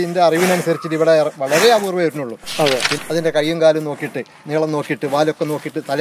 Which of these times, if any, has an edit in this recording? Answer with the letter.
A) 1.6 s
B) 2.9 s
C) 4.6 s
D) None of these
B